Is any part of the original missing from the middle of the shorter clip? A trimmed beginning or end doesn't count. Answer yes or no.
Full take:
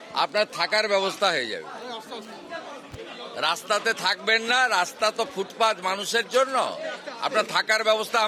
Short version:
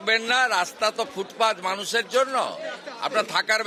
no